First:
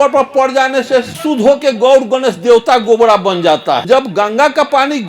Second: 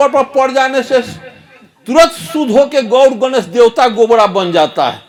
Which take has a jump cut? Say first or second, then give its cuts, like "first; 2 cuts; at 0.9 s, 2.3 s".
first; 2 cuts; at 1.1 s, 3.8 s